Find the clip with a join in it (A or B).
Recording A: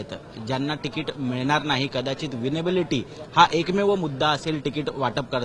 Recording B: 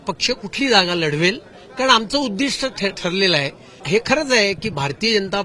B